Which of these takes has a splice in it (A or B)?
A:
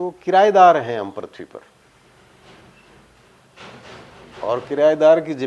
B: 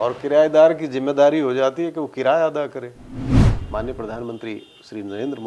B